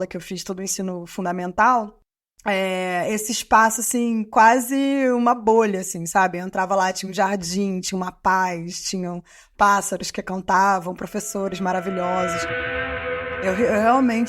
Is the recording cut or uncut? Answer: cut